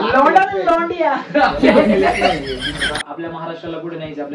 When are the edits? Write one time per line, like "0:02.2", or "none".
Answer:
0:02.9